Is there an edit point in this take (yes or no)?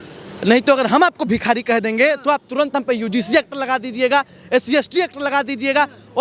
no